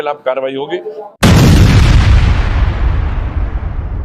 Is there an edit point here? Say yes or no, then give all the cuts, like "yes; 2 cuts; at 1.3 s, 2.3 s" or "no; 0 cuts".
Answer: no; 0 cuts